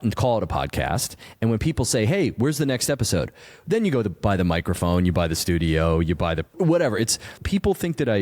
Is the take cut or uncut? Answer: cut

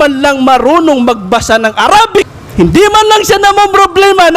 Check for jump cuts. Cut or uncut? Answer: cut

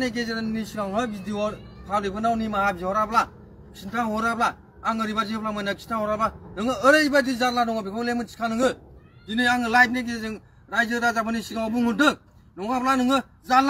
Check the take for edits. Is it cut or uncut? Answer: uncut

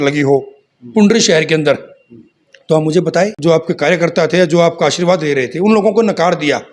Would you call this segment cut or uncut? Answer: cut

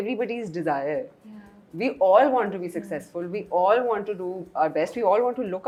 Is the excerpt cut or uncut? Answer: uncut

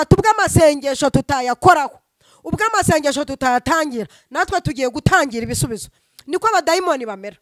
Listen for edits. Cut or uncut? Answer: uncut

